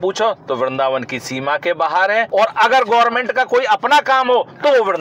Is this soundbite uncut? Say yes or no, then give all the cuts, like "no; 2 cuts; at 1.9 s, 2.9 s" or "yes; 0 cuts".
yes; 0 cuts